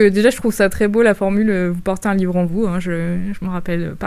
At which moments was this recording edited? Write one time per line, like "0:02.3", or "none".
none